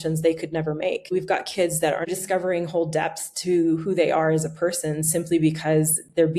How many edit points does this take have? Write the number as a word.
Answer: two